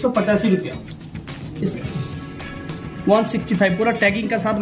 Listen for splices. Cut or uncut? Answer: cut